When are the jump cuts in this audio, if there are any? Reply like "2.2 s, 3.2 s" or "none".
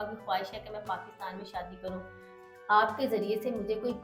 2.3 s